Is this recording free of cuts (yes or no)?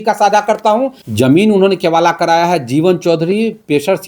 no